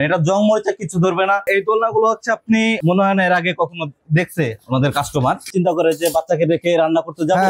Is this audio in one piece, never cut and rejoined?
no; 2 cuts; at 1.5 s, 5.5 s

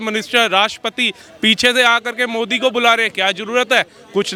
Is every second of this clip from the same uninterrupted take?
yes; 0 cuts

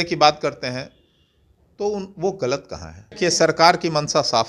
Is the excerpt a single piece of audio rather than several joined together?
no; 1 cut; at 3.2 s

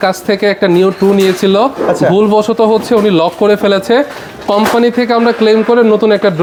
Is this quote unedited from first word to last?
yes; 0 cuts

